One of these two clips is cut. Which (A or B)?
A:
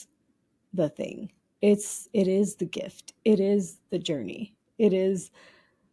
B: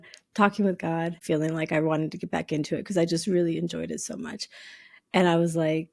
B